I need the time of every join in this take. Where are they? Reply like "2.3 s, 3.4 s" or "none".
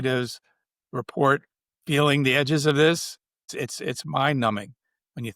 3.5 s